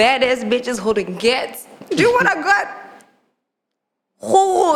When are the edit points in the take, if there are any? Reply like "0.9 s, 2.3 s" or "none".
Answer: none